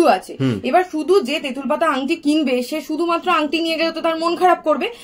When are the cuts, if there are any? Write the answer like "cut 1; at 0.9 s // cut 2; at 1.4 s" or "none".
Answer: none